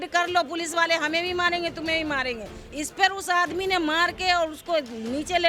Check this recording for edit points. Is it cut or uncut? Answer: uncut